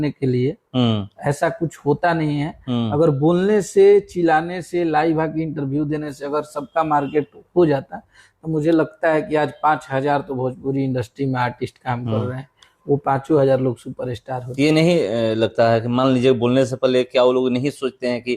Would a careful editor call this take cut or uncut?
uncut